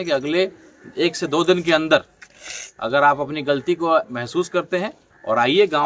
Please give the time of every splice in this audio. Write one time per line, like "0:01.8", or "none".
none